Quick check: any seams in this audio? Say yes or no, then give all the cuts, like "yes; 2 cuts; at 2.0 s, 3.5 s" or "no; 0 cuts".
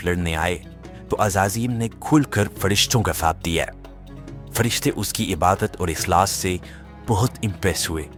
no; 0 cuts